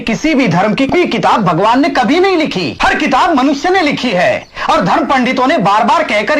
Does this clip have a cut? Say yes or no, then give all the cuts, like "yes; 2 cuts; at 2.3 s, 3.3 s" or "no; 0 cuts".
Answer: yes; 2 cuts; at 0.9 s, 2.7 s